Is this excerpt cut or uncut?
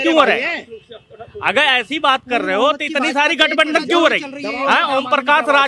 uncut